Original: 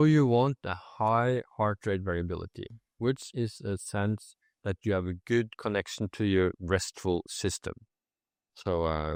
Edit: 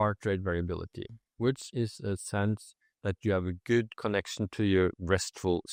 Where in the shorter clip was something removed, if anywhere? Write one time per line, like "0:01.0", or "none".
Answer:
none